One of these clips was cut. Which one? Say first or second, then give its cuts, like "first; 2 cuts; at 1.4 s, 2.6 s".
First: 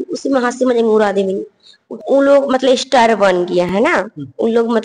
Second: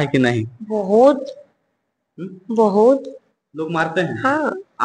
first; 1 cut; at 1.9 s